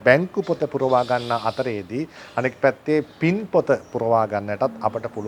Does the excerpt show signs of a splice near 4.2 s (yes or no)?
no